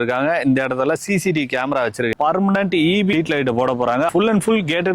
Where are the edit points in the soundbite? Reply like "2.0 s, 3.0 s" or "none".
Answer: 2.1 s, 3.1 s, 4.1 s